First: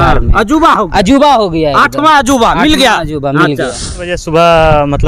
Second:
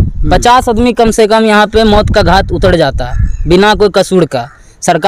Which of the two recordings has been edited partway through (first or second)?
first